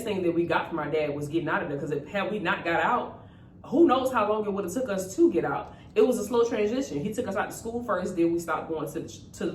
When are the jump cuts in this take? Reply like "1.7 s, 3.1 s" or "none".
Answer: none